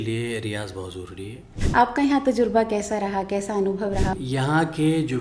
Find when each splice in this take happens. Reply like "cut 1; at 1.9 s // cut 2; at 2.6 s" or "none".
cut 1; at 1.5 s // cut 2; at 4.1 s